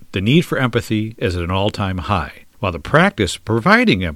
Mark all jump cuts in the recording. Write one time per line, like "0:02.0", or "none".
0:02.4